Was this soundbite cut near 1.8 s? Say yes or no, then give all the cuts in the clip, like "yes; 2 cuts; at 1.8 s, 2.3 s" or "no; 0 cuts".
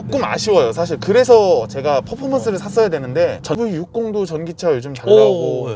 no; 1 cut; at 3.6 s